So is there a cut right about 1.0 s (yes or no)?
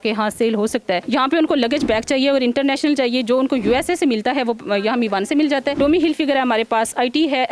yes